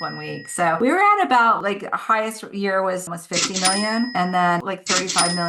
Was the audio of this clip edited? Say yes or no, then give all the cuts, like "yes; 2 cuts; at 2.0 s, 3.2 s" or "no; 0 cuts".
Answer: no; 0 cuts